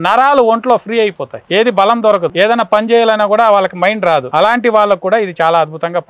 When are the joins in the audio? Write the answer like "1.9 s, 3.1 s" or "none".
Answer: 1.3 s, 2.3 s, 4.3 s